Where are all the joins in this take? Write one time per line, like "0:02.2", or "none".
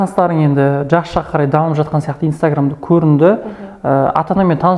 none